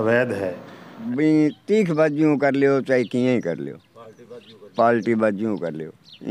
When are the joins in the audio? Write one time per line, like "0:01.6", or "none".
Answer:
0:01.0

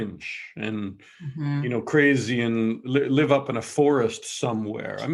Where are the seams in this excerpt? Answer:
none

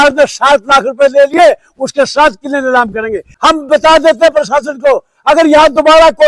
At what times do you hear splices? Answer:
0:03.2

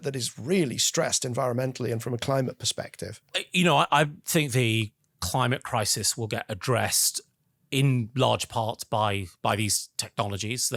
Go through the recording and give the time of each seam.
none

